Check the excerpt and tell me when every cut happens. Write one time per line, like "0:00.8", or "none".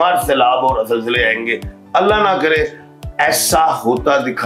none